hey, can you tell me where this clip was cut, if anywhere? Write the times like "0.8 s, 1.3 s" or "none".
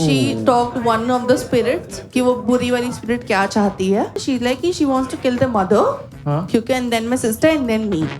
4.2 s